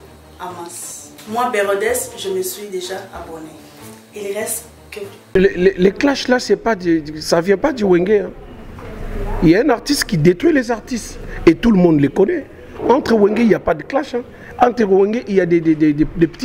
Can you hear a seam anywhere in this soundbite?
yes; 1 cut; at 5.3 s

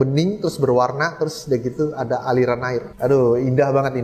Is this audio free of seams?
no; 1 cut; at 2.9 s

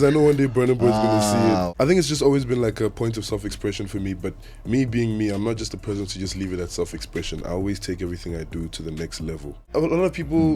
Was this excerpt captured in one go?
no; 2 cuts; at 1.7 s, 9.6 s

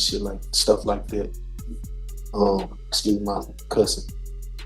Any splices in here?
no; 0 cuts

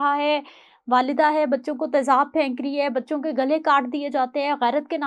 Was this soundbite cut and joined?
no; 0 cuts

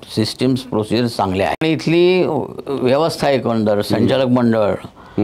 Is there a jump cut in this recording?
yes; 1 cut; at 1.6 s

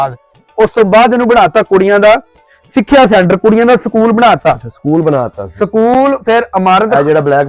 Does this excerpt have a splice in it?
no; 0 cuts

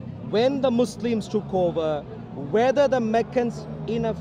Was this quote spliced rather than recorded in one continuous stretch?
no; 0 cuts

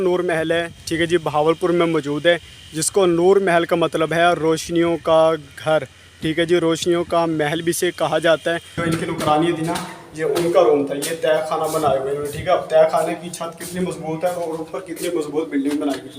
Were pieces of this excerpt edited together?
yes; 1 cut; at 8.7 s

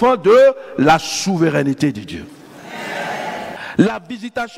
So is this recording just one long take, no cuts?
no; 1 cut; at 3.6 s

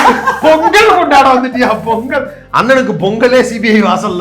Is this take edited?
yes; 1 cut; at 2.4 s

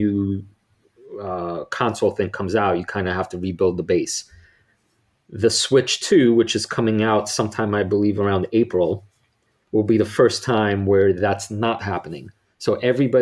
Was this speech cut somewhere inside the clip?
no; 0 cuts

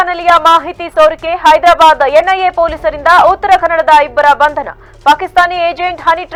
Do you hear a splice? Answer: no; 0 cuts

